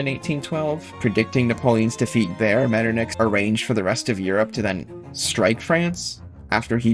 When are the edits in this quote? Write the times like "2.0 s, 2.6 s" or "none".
0.9 s, 3.1 s